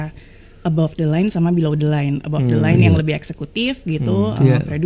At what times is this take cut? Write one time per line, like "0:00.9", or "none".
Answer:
none